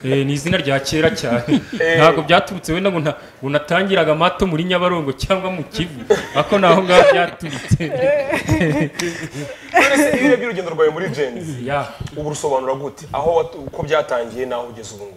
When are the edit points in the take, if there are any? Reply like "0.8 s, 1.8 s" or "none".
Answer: none